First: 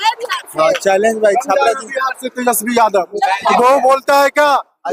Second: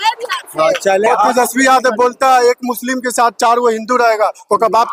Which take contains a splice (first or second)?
second